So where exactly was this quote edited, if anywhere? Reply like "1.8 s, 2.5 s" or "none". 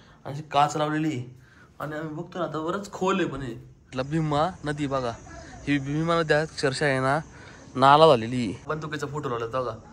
3.9 s, 8.7 s